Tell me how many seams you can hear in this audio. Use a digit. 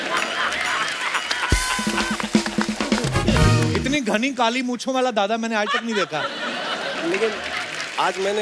1